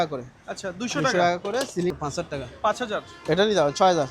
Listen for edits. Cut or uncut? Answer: cut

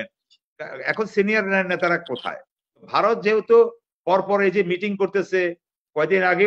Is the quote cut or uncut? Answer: cut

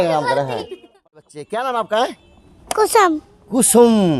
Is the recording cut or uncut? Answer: cut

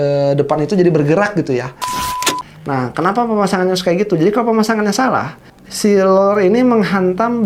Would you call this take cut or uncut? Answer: cut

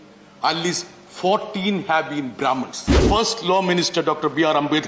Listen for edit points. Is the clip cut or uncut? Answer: cut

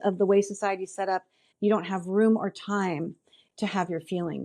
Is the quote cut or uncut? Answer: cut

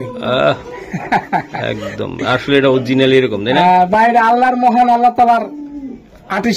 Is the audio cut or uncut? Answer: uncut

